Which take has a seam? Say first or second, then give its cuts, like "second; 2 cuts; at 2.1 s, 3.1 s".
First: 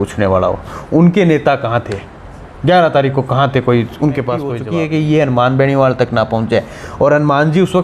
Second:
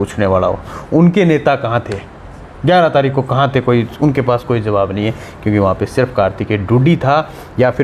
first; 1 cut; at 4.6 s